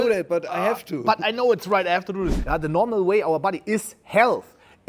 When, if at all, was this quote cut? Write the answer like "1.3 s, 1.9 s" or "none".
2.4 s